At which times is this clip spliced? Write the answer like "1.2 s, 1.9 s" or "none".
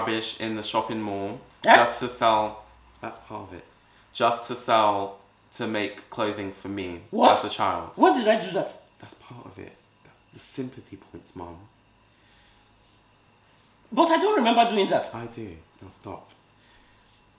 1.4 s, 7.0 s